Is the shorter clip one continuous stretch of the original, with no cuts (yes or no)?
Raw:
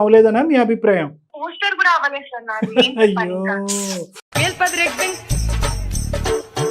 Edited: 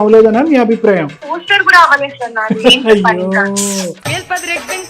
no